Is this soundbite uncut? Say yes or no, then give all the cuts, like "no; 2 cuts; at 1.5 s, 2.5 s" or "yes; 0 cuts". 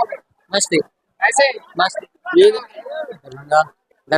no; 1 cut; at 2.5 s